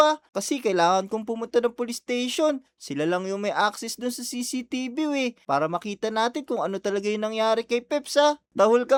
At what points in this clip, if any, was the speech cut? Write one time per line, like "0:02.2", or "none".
none